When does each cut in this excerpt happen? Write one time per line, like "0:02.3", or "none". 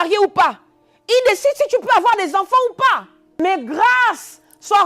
0:03.2

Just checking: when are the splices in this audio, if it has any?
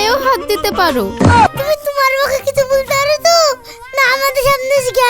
0:01.5

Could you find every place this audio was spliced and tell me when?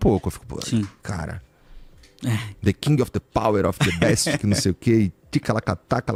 none

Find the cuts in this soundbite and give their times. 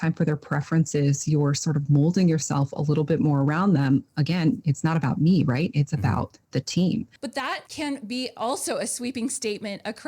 0:07.2

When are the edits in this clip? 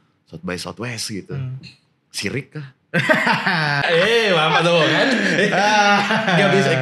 0:03.8

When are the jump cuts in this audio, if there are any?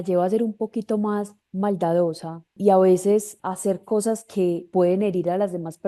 0:02.5
0:03.4
0:04.7

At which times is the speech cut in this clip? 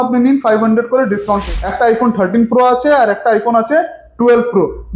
0:01.4

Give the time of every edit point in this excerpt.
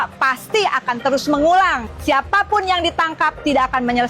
0:01.9

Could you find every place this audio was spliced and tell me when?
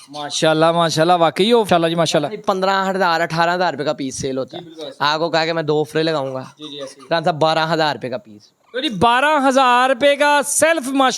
0:01.7

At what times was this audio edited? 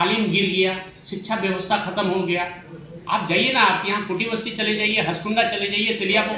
none

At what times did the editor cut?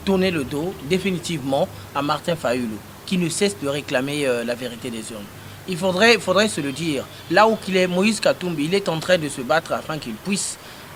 none

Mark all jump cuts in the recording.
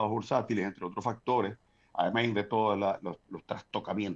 none

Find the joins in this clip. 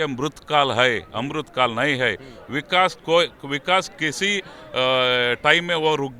none

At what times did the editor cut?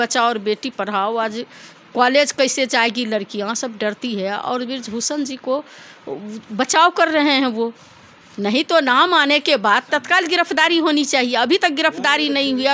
none

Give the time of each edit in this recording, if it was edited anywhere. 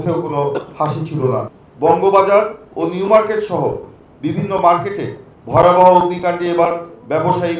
0:01.5

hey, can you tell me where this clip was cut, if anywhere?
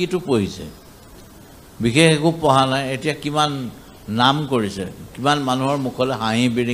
none

